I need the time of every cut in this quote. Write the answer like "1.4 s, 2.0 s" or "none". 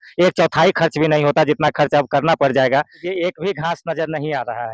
3.0 s